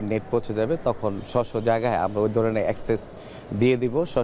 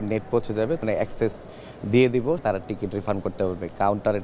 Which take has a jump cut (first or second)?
second